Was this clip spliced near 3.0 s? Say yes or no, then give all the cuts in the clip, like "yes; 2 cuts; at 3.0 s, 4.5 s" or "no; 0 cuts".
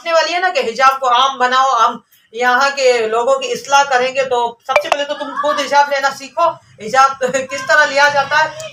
no; 0 cuts